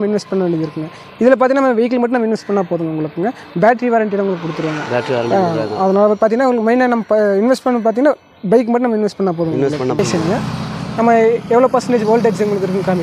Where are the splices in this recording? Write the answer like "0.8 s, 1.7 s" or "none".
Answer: 10.0 s